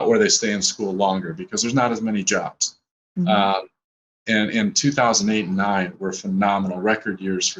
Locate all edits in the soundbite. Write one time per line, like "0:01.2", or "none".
none